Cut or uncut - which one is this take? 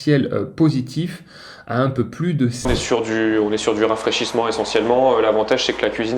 cut